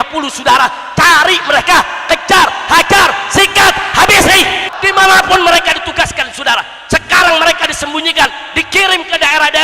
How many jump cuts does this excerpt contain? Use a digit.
1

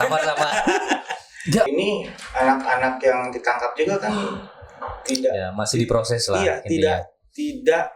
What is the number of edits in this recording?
1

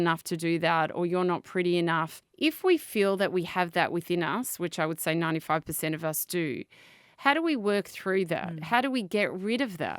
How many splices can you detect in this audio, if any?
1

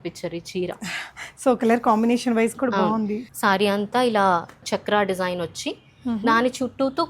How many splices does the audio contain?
2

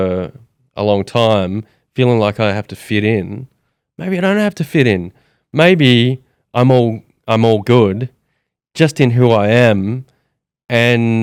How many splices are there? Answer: 0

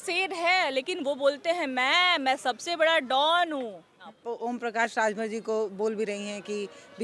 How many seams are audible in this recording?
1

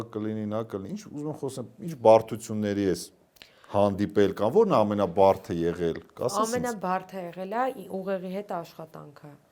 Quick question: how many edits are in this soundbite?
0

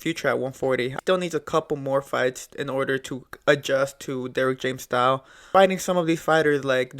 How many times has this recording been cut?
2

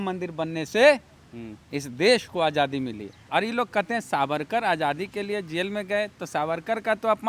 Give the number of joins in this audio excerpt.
1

